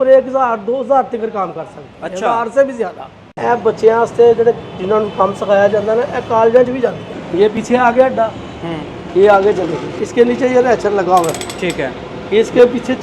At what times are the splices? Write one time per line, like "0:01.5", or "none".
0:03.3
0:07.4
0:10.0